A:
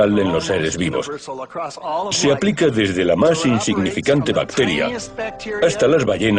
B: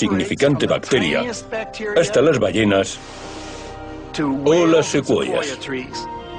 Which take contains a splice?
A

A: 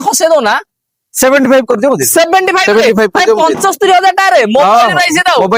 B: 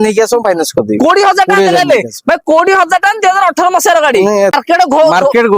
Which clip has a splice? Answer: B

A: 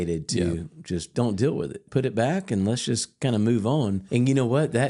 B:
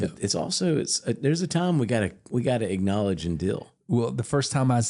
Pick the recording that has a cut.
A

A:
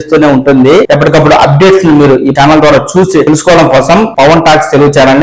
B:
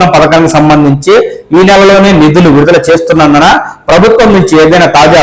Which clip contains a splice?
A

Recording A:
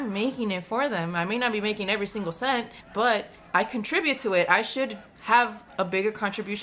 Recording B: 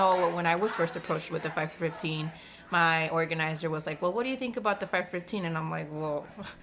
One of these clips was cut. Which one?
A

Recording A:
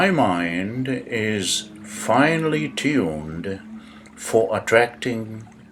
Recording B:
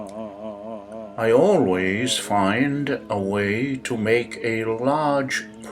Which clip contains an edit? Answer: B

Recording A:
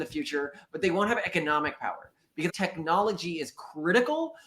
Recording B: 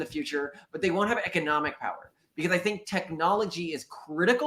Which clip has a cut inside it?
A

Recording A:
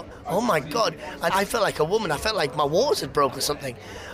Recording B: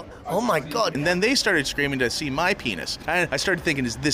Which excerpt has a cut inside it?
B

